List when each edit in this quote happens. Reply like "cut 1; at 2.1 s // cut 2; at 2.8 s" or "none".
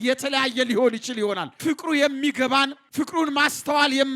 cut 1; at 1.5 s // cut 2; at 2.8 s